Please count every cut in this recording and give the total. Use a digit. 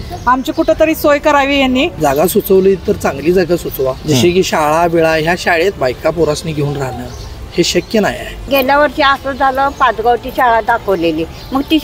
4